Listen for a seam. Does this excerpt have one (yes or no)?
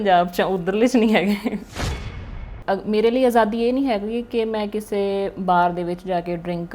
yes